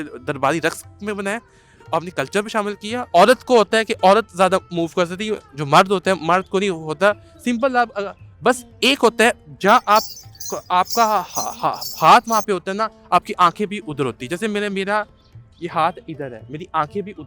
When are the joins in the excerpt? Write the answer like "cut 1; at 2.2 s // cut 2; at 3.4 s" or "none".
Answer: cut 1; at 3.1 s